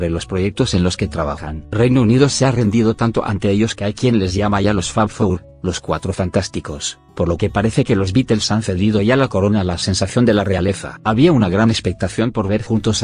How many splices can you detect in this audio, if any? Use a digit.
1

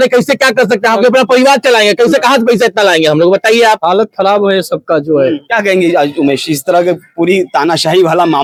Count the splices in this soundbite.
0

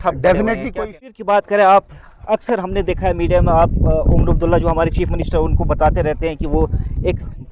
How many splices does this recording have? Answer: 1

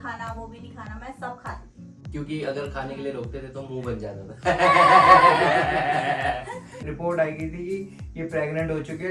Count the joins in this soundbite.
2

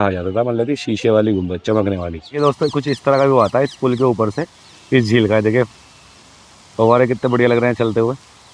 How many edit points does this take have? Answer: 1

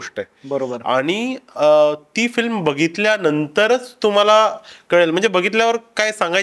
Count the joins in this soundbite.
0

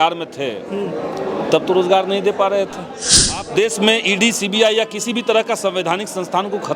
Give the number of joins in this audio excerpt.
1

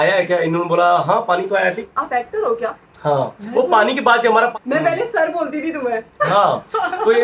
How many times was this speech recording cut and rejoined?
2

